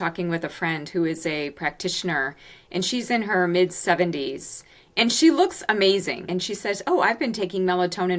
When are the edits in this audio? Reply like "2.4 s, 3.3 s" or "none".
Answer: 6.2 s